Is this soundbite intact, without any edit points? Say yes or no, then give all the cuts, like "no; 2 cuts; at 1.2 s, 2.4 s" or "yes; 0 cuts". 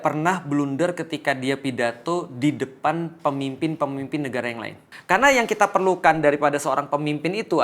no; 1 cut; at 4.9 s